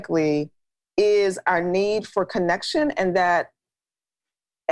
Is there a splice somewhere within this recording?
no; 0 cuts

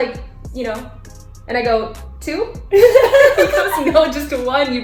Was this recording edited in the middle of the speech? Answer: no; 0 cuts

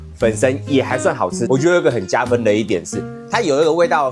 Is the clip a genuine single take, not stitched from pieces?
no; 1 cut; at 1.4 s

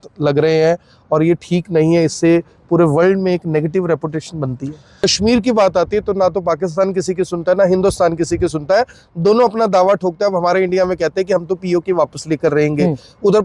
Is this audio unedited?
no; 1 cut; at 4.9 s

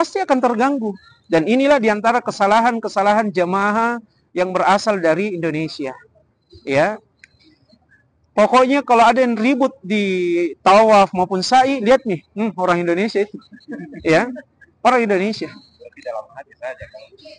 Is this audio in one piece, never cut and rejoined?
yes; 0 cuts

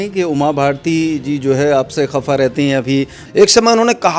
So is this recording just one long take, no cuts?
no; 1 cut; at 3.2 s

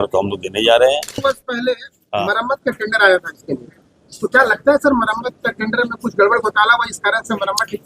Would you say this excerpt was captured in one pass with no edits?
no; 1 cut; at 1.2 s

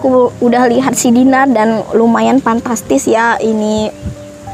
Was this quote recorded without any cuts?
yes; 0 cuts

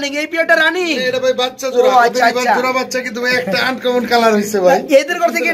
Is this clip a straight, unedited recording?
yes; 0 cuts

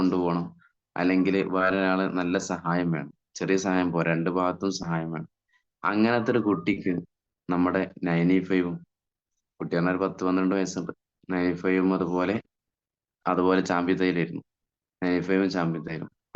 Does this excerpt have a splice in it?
yes; 1 cut; at 13.1 s

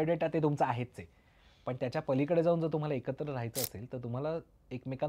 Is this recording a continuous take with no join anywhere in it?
yes; 0 cuts

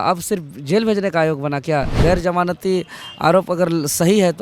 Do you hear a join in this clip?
yes; 1 cut; at 1.9 s

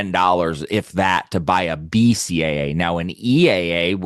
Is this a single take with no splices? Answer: yes; 0 cuts

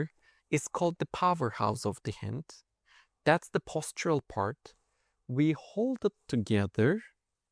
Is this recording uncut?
yes; 0 cuts

